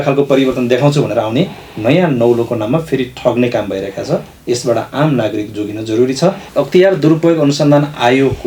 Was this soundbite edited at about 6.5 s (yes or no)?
yes